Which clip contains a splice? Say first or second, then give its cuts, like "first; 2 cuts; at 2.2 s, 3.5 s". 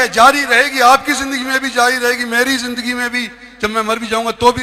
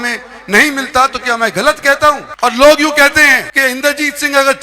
second; 2 cuts; at 2.3 s, 3.5 s